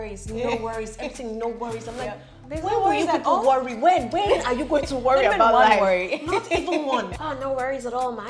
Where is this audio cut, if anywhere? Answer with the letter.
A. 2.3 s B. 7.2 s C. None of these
B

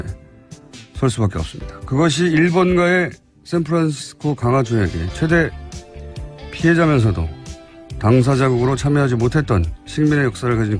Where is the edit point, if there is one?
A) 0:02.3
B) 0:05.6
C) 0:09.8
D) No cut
D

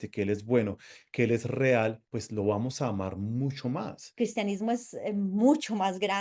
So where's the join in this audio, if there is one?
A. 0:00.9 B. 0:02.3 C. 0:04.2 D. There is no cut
C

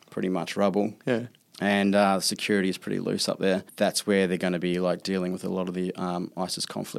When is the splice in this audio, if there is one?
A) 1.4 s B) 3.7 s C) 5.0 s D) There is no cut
B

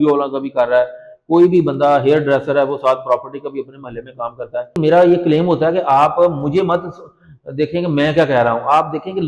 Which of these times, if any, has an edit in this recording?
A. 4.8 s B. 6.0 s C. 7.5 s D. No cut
A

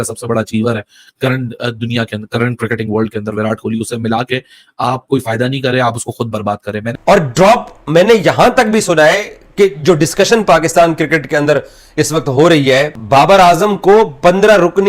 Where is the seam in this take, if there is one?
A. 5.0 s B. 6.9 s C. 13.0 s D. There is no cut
B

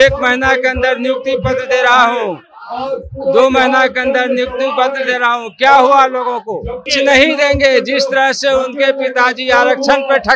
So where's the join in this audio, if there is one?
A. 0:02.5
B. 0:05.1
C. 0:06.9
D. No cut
C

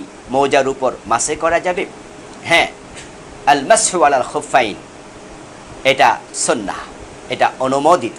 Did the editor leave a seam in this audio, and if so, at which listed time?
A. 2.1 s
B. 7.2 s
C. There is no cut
C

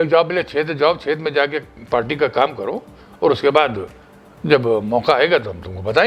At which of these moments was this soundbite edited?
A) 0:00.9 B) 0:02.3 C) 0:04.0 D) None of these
D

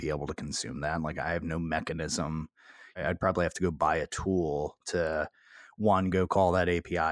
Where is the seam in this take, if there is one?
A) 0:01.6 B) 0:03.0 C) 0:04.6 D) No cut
B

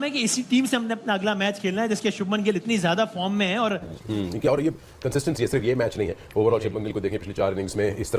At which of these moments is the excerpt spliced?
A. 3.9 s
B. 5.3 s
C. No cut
A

